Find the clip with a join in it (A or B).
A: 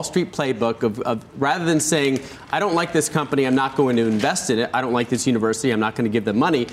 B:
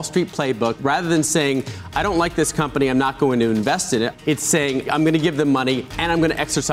B